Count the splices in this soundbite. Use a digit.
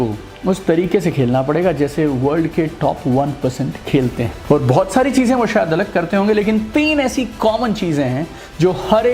1